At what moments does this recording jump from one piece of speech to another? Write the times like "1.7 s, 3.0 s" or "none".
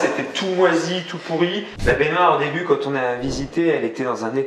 1.7 s